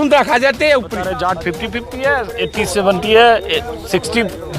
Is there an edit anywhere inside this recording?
yes; 1 cut; at 1.2 s

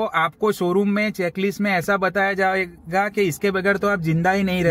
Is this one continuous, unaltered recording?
yes; 0 cuts

